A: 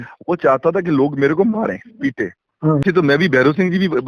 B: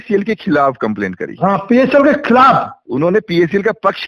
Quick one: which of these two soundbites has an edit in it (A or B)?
A